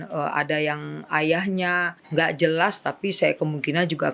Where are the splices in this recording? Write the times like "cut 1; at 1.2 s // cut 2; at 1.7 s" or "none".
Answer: cut 1; at 2.0 s